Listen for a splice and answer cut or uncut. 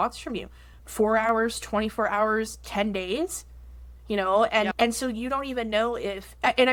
uncut